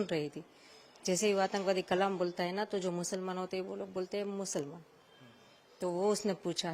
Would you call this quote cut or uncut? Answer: uncut